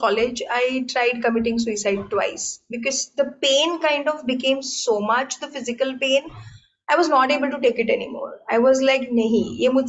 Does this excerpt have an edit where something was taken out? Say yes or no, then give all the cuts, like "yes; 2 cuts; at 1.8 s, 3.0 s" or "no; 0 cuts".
no; 0 cuts